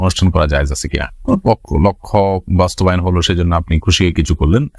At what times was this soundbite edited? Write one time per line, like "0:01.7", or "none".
none